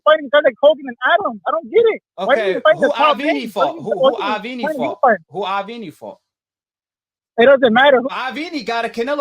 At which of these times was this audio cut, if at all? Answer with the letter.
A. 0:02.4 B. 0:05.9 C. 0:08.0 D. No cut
C